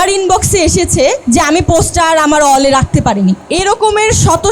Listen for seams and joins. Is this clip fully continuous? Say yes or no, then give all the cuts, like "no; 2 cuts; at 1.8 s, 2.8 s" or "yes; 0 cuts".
no; 2 cuts; at 1.2 s, 3.4 s